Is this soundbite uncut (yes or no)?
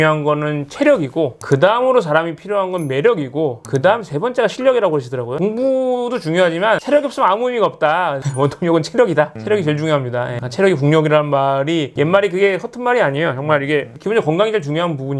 yes